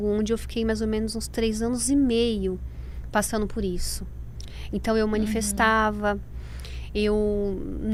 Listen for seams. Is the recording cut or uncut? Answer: uncut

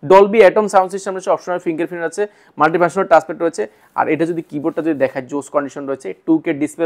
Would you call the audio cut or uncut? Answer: uncut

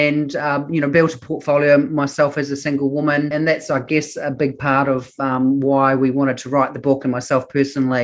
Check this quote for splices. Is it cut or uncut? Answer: cut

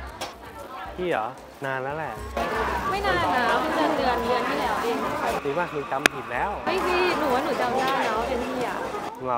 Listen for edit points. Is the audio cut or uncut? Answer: uncut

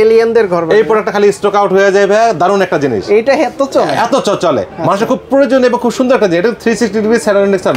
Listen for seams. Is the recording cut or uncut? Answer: uncut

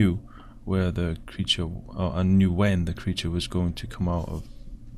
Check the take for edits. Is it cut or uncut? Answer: cut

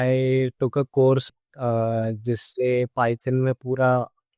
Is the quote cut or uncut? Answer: cut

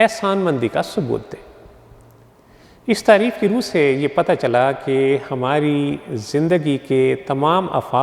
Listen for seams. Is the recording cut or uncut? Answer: uncut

